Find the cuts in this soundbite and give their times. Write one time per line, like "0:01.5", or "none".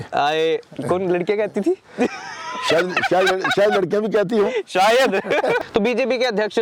0:05.6